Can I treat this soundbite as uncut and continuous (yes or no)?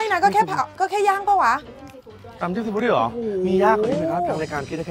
yes